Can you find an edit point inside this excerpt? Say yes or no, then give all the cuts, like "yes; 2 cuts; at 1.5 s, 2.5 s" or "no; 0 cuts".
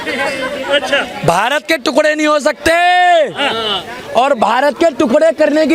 no; 0 cuts